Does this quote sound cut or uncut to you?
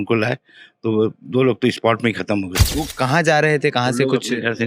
cut